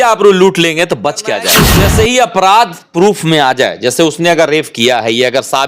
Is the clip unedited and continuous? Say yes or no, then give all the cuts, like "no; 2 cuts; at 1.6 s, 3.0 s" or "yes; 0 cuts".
no; 1 cut; at 1.7 s